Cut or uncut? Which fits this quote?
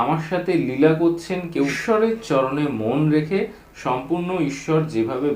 cut